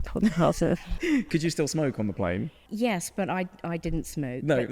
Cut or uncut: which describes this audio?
cut